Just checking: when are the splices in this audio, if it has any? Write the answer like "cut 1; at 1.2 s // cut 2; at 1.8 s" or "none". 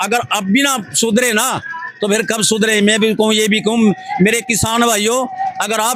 none